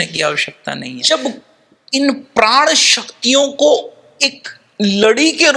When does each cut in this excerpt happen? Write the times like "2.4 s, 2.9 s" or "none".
0.9 s